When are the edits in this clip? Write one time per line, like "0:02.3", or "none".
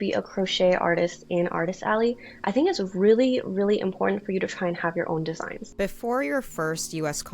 0:05.6